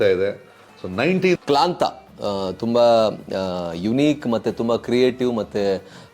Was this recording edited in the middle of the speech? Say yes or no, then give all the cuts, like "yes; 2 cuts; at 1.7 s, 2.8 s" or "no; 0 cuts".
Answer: yes; 1 cut; at 1.4 s